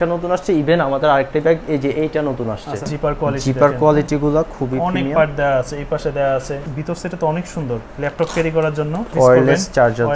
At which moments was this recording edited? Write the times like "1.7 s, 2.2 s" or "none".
2.9 s, 6.6 s, 9.1 s